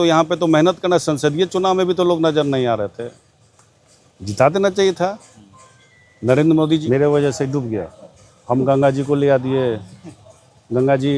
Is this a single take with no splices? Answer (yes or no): no